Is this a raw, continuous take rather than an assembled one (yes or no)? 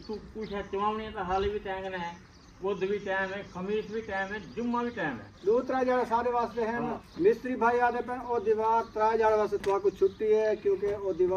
yes